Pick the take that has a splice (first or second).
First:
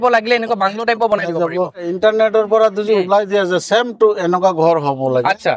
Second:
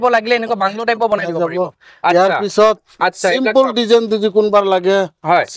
first